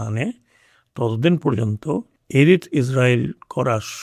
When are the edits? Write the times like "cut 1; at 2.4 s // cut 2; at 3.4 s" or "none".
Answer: cut 1; at 2.2 s